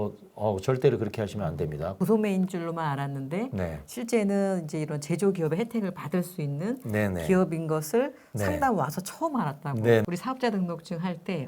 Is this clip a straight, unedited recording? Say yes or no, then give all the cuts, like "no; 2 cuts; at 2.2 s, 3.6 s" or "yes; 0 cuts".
no; 2 cuts; at 1.9 s, 10.1 s